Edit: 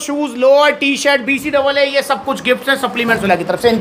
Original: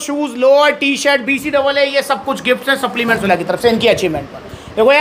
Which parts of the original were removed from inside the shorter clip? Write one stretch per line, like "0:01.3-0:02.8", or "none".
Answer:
none